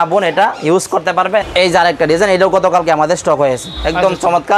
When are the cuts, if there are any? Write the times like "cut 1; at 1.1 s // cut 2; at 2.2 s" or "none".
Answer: cut 1; at 1.4 s